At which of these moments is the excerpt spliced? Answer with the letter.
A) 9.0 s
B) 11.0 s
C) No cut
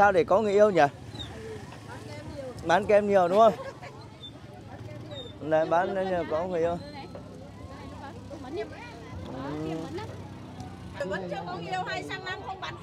B